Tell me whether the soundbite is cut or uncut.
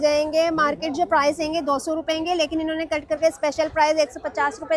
uncut